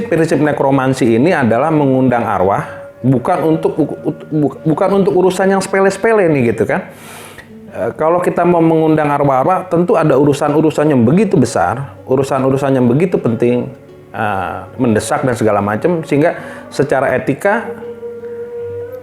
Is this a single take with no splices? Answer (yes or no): yes